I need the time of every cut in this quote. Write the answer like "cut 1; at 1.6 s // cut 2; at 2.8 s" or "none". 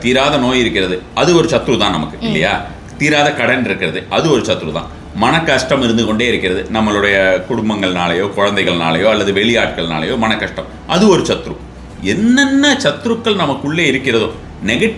none